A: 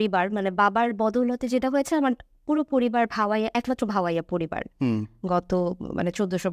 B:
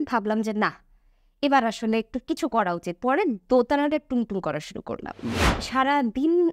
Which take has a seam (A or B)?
B